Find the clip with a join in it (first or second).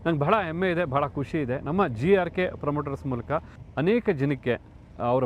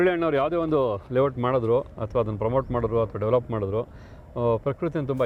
first